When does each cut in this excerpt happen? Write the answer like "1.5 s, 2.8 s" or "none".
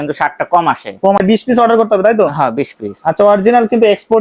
1.2 s